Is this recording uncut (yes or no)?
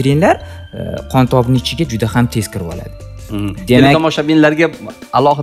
yes